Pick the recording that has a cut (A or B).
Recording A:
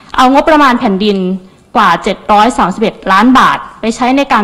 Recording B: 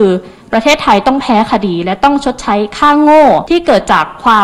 B